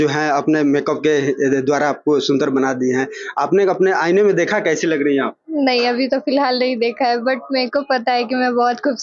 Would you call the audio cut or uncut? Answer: uncut